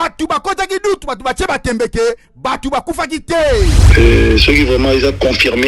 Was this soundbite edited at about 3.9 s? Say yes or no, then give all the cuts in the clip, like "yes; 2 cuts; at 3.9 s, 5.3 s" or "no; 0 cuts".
yes; 1 cut; at 3.9 s